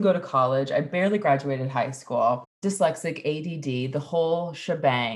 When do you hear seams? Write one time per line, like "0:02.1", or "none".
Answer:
0:02.5